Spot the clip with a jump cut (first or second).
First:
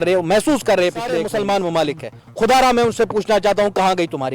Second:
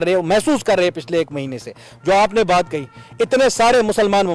first